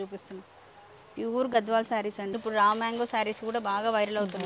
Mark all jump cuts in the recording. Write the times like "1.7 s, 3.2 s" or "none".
2.4 s